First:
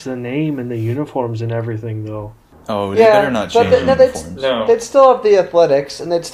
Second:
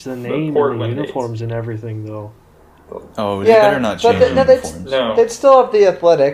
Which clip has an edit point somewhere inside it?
first; 1 cut; at 2.4 s

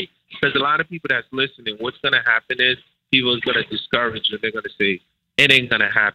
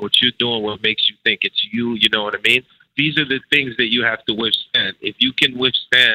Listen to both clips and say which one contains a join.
second; 1 cut; at 2.8 s

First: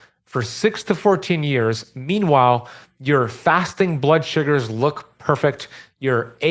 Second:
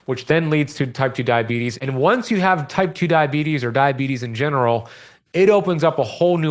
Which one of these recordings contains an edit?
second; 1 cut; at 1.7 s

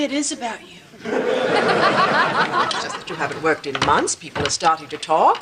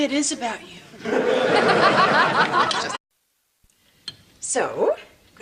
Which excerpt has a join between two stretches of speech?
first; 1 cut; at 3.0 s

